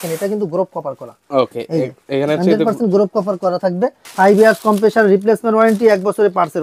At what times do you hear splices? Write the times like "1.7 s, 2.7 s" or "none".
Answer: 4.0 s